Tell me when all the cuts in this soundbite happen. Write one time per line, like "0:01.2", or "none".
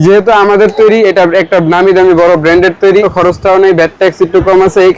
0:03.1